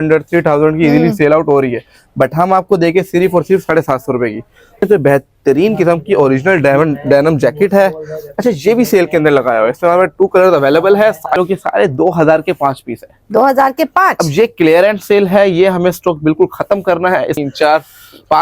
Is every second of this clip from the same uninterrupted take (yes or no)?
no